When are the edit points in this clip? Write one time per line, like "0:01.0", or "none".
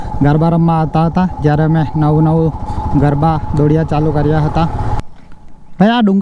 0:05.0